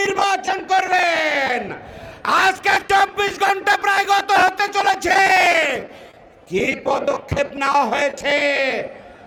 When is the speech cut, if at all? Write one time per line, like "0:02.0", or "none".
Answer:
none